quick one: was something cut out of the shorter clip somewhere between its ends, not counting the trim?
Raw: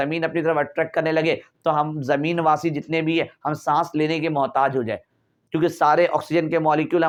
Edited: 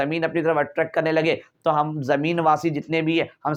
no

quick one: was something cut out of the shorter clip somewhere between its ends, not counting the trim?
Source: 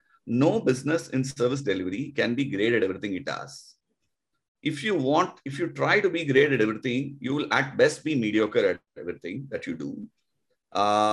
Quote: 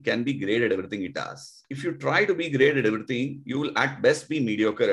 yes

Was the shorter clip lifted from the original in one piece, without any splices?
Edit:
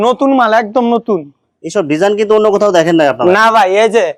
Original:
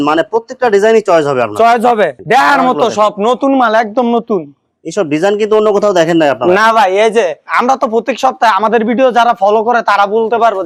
yes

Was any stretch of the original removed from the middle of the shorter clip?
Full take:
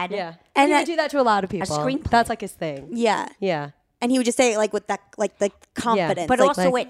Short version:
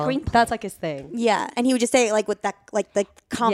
yes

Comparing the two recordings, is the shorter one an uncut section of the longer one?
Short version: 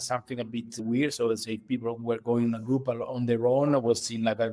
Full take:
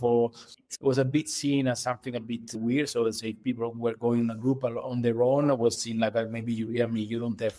yes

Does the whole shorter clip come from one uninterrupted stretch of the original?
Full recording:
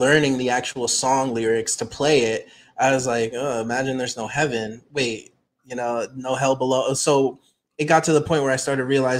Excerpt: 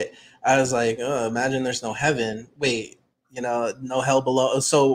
yes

